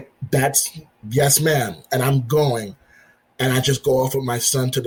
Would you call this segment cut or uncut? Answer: uncut